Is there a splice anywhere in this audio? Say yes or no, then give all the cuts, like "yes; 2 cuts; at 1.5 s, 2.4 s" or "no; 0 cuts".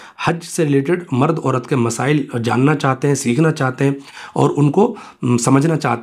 no; 0 cuts